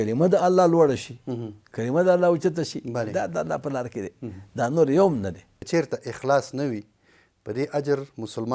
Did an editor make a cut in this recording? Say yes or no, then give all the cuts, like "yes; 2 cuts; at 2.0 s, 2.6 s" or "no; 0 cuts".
yes; 1 cut; at 5.5 s